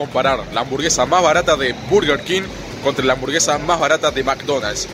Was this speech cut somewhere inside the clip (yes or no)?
no